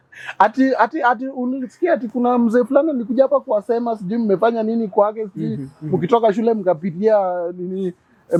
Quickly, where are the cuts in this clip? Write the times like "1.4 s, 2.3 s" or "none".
none